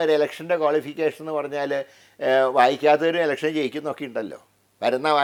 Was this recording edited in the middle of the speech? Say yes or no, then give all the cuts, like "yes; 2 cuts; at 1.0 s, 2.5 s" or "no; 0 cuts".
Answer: no; 0 cuts